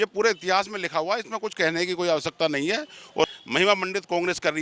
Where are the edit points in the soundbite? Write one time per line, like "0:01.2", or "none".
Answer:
0:03.3